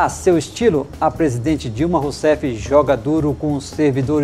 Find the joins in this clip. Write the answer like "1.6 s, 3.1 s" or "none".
none

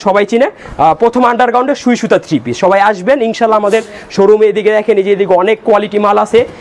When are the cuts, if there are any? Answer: none

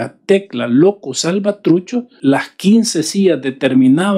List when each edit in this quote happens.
2.1 s

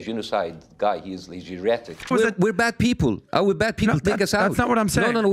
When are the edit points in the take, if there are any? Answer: 2.1 s

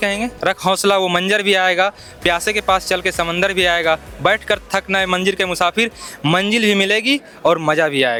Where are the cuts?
none

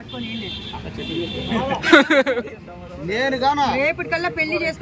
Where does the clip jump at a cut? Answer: 2.3 s

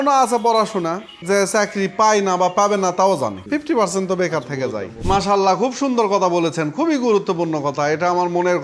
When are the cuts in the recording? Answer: 1.1 s, 3.4 s, 4.9 s

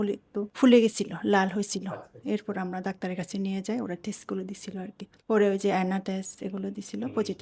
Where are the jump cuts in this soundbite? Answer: none

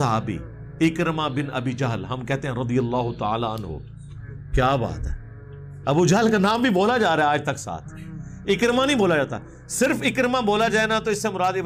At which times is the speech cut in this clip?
none

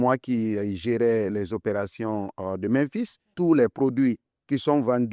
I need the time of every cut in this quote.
3.3 s

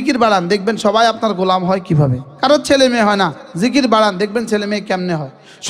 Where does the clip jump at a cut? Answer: 2.2 s

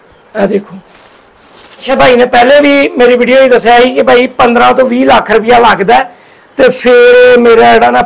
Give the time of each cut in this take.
1.9 s

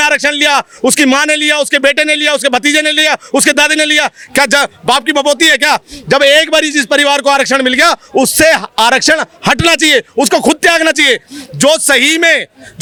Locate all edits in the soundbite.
none

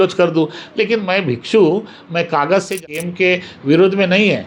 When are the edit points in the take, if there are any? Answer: 2.7 s

